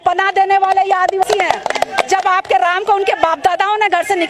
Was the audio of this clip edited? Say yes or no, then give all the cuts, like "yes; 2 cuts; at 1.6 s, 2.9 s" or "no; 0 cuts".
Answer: yes; 1 cut; at 1.2 s